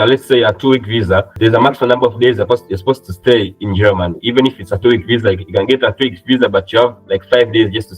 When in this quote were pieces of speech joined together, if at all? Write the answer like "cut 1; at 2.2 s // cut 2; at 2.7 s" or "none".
cut 1; at 1.3 s